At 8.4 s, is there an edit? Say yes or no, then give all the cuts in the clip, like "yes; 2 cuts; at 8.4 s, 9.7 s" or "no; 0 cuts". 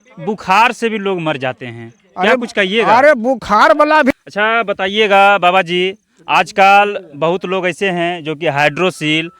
no; 1 cut; at 4.1 s